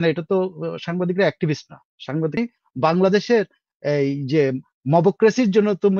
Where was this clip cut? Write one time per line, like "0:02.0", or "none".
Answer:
0:02.4